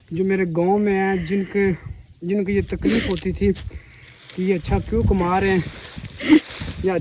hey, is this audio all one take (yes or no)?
yes